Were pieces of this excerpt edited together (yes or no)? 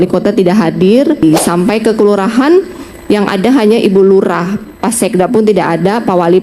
yes